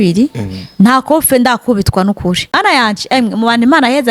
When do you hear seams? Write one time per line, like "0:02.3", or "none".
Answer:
0:02.6